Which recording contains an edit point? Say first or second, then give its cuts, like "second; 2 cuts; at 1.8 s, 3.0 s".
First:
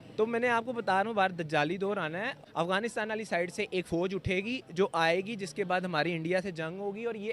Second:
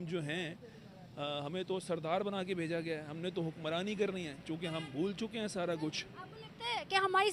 first; 1 cut; at 2.3 s